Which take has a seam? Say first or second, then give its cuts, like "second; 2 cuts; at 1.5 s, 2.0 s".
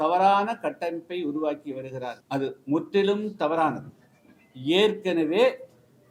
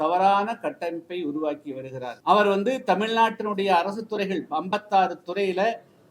second; 1 cut; at 2.2 s